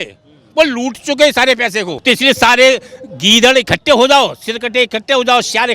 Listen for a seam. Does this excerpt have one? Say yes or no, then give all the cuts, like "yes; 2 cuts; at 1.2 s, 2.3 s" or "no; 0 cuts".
yes; 1 cut; at 2.0 s